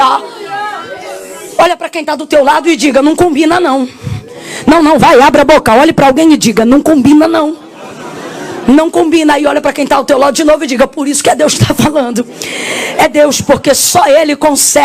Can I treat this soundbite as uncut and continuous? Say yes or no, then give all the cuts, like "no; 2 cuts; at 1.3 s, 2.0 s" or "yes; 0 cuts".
yes; 0 cuts